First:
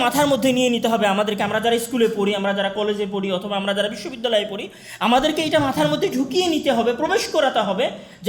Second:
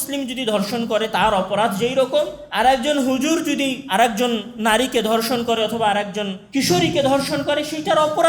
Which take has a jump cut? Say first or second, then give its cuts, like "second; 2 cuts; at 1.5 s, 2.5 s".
second; 2 cuts; at 2.4 s, 3.8 s